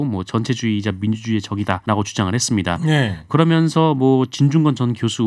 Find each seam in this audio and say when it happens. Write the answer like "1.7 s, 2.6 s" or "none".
1.8 s, 3.3 s